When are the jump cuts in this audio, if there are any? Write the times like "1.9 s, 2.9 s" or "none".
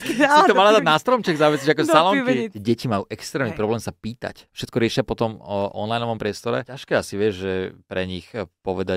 2.5 s, 4.5 s, 6.7 s